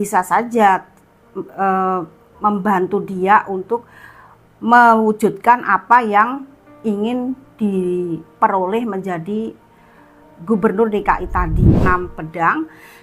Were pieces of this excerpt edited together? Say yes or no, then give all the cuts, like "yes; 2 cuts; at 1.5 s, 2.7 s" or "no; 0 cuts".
yes; 1 cut; at 11.8 s